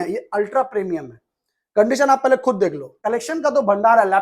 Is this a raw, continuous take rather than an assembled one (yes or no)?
no